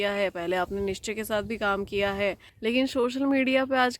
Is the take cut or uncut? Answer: cut